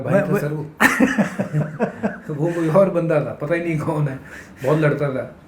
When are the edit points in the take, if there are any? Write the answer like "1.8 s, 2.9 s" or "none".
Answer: none